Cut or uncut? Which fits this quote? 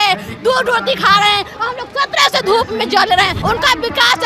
cut